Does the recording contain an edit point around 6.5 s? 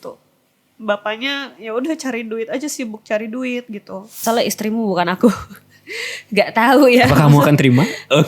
no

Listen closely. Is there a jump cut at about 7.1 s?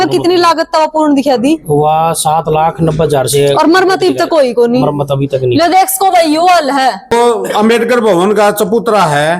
yes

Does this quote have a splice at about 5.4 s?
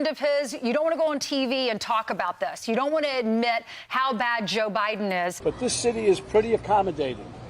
yes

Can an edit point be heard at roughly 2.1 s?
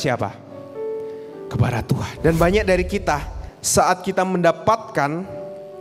yes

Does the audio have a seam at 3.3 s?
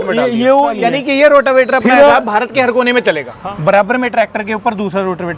yes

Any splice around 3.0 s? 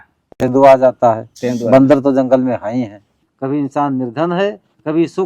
yes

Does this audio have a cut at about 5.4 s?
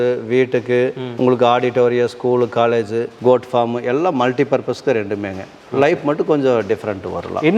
no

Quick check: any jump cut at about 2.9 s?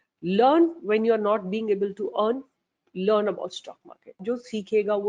no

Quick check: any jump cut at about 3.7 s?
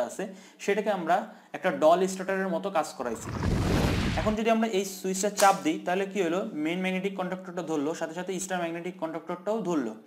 yes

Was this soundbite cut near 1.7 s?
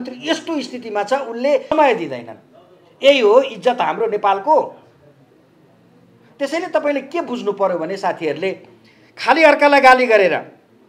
yes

